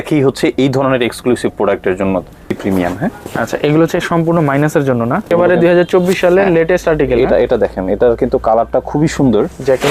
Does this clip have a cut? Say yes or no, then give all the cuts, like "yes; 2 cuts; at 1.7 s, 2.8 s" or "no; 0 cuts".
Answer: yes; 2 cuts; at 2.6 s, 5.3 s